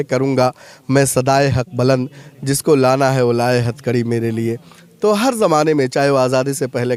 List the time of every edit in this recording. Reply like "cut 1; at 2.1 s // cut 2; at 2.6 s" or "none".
none